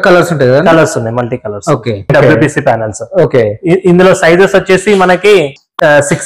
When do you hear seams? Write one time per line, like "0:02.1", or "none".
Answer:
0:02.1